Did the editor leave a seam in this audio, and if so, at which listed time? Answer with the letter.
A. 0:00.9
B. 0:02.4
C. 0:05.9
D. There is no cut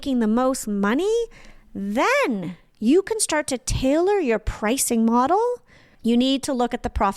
C